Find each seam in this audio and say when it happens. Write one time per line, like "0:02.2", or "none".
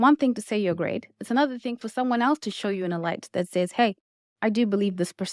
none